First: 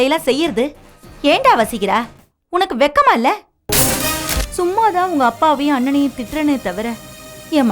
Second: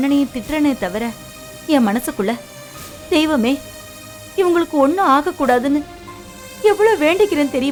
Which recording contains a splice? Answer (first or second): first